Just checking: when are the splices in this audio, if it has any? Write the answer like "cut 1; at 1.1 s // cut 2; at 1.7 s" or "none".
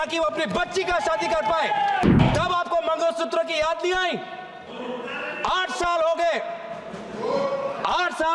cut 1; at 2.1 s